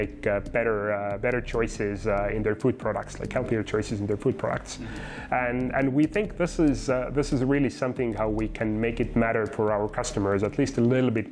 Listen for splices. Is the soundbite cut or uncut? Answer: uncut